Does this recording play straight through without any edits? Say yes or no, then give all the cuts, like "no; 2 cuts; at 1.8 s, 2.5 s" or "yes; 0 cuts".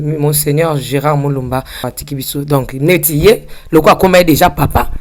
no; 1 cut; at 1.9 s